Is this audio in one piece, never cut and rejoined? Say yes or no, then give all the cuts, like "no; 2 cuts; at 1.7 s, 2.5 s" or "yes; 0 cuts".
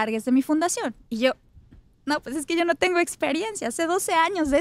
yes; 0 cuts